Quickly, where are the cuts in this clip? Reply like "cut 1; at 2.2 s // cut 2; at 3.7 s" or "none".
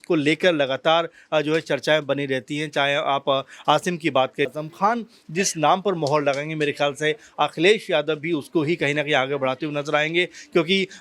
cut 1; at 4.5 s